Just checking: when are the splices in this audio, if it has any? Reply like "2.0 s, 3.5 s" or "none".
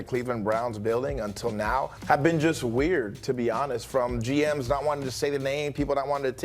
2.0 s